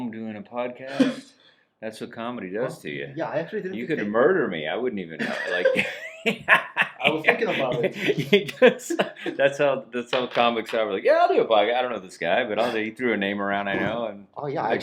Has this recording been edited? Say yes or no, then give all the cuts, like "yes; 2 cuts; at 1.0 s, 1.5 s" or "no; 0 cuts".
no; 0 cuts